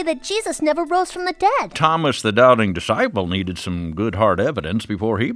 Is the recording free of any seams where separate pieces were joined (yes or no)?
no